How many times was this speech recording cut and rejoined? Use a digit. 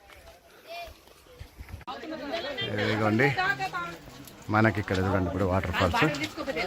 1